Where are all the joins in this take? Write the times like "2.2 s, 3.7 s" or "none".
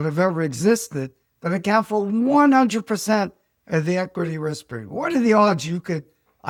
none